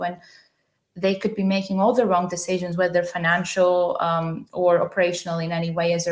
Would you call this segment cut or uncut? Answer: uncut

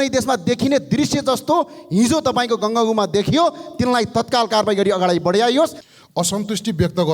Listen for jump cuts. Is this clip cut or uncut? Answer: cut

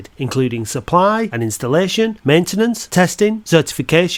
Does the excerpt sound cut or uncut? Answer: uncut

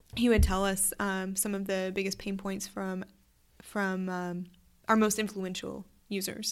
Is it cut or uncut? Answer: uncut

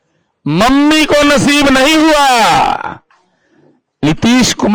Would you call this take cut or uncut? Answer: uncut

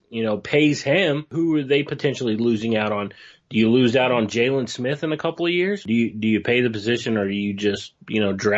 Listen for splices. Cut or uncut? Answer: cut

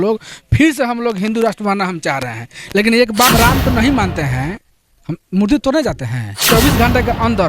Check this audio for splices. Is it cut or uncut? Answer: cut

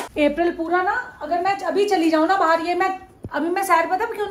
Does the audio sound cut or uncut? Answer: uncut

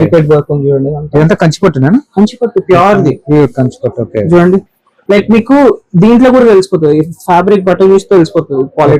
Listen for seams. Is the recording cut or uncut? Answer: uncut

